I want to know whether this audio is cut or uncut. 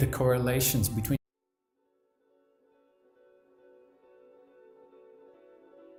uncut